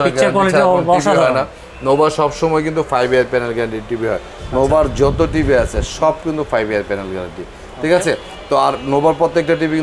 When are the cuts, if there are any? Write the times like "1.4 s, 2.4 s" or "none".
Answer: none